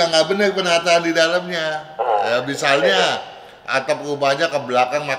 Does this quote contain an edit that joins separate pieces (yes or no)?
no